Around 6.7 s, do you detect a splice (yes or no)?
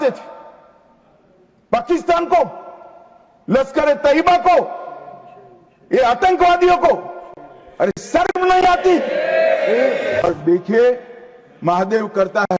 no